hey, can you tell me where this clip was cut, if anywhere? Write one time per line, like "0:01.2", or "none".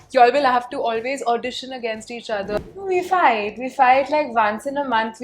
0:02.6